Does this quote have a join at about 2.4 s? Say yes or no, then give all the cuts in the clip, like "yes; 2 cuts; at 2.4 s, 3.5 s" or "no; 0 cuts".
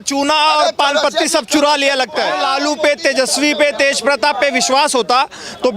yes; 1 cut; at 2.4 s